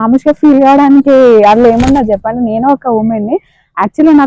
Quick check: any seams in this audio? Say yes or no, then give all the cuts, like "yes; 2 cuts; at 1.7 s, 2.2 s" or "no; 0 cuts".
no; 0 cuts